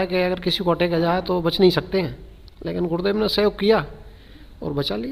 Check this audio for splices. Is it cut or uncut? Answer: uncut